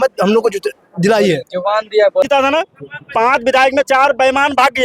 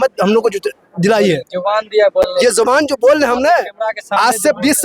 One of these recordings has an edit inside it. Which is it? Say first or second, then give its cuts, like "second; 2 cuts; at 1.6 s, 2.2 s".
first; 1 cut; at 2.3 s